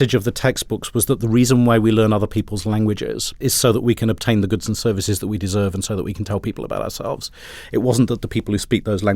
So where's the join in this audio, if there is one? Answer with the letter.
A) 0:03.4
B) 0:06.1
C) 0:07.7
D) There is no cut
A